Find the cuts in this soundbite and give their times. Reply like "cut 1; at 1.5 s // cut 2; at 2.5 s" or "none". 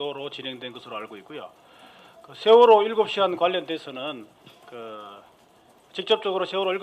cut 1; at 3.6 s